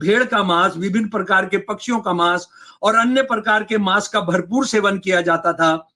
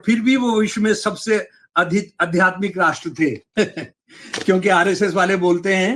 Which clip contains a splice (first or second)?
second